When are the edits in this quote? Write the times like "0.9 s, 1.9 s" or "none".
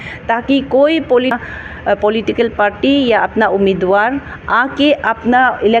1.3 s